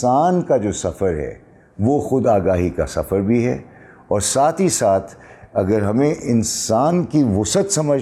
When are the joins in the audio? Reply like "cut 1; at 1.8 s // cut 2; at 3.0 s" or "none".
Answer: none